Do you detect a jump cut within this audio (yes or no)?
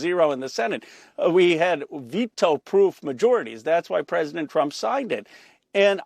no